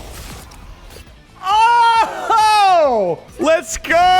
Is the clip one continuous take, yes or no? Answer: no